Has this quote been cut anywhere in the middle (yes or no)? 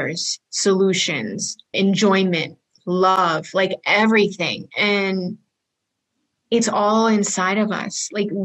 yes